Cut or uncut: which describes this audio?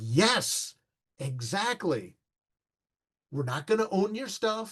uncut